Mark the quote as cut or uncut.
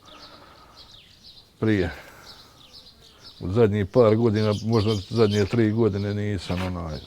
cut